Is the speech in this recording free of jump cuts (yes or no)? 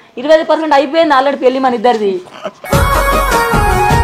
yes